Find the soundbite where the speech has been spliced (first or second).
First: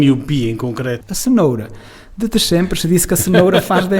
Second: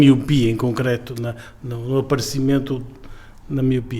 first